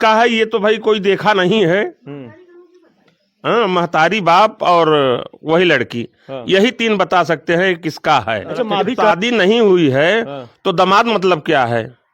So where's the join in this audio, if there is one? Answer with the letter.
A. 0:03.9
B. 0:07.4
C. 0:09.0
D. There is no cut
C